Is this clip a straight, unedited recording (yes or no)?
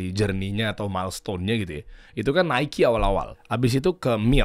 no